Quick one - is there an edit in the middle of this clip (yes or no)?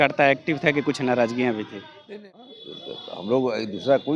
yes